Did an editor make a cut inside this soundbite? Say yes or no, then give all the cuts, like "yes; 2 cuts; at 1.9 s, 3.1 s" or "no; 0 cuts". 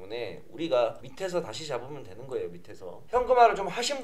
yes; 2 cuts; at 1.0 s, 3.0 s